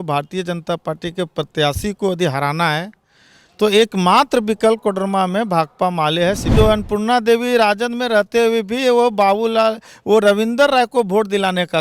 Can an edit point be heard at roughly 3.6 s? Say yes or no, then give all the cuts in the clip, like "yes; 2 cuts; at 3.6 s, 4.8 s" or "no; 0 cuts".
no; 1 cut; at 6.5 s